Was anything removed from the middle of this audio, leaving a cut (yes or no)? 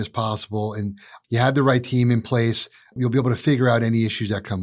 yes